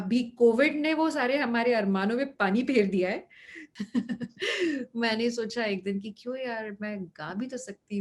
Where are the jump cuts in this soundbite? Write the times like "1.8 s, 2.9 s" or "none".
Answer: 3.6 s

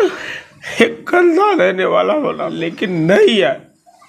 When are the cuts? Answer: 2.9 s

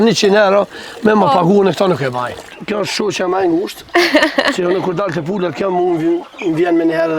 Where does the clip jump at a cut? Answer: 2.5 s

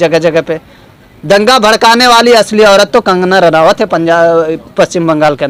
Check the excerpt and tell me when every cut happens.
none

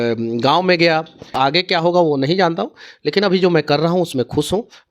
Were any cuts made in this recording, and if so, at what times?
1.3 s

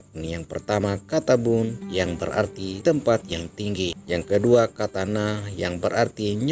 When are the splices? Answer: 2.2 s, 4.0 s

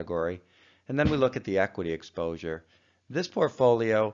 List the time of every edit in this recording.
2.4 s

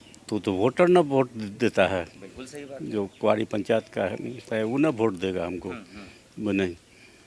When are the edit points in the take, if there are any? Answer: none

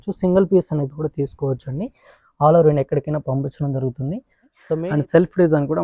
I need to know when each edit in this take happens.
4.6 s

